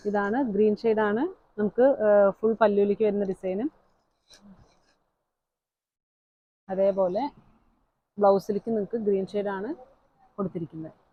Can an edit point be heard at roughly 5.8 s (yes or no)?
no